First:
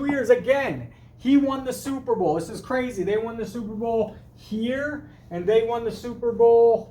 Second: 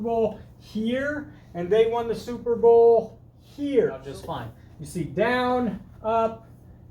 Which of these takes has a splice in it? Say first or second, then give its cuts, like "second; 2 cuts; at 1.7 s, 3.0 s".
second; 1 cut; at 4.0 s